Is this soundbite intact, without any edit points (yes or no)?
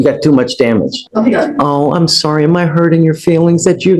no